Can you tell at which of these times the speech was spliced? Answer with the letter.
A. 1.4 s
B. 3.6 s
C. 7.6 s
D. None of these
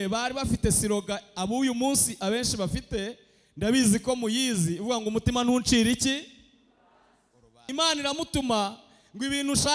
C